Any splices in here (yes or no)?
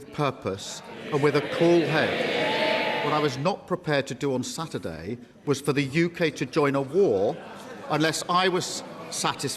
yes